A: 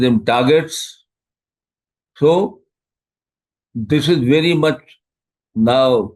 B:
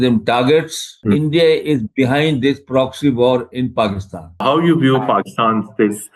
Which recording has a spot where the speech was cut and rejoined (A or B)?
B